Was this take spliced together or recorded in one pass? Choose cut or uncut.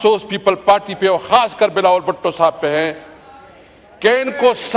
uncut